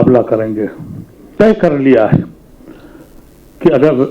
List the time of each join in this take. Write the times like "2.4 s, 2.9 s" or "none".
1.3 s